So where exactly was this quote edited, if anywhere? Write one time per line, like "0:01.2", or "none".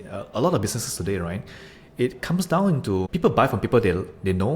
0:03.1